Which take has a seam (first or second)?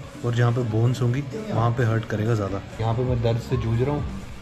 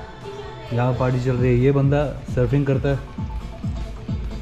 first